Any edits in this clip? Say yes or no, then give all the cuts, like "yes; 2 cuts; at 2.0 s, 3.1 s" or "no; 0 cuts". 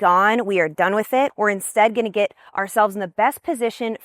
yes; 1 cut; at 1.3 s